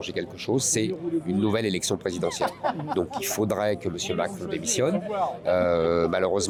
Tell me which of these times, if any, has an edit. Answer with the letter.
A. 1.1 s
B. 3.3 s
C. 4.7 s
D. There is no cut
D